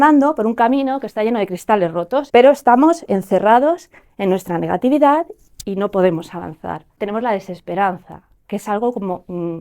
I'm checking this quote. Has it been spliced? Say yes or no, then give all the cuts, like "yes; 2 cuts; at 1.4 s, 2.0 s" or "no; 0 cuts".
yes; 2 cuts; at 2.3 s, 6.9 s